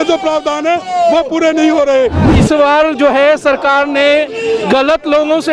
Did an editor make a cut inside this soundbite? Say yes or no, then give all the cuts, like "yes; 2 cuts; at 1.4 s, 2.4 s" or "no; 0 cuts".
yes; 1 cut; at 2.3 s